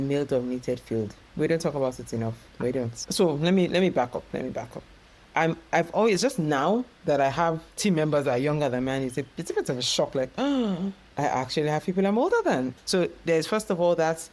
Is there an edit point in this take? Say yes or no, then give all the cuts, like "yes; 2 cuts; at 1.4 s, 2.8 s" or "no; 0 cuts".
yes; 2 cuts; at 3.0 s, 12.7 s